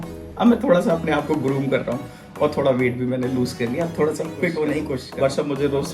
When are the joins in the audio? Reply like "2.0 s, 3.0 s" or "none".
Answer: 5.0 s